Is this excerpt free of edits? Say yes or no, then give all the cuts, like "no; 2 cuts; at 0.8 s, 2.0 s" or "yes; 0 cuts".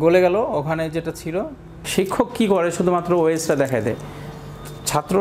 no; 1 cut; at 1.8 s